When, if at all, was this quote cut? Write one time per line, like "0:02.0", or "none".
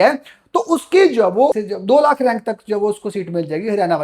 0:01.6